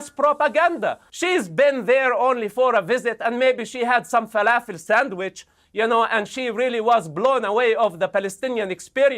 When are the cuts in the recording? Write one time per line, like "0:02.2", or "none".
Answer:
0:01.1